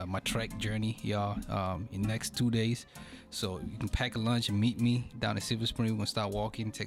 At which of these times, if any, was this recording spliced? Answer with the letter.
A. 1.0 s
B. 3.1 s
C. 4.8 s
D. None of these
D